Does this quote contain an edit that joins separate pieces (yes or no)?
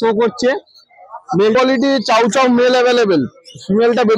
yes